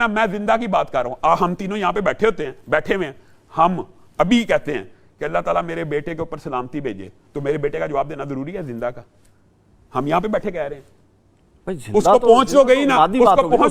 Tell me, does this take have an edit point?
no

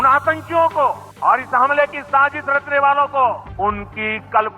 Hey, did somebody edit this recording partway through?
yes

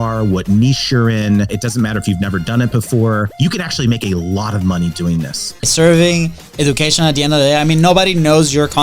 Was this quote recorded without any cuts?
no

